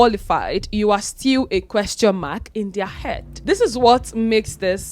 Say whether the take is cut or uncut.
cut